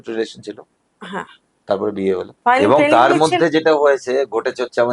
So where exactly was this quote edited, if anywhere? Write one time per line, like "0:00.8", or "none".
0:02.3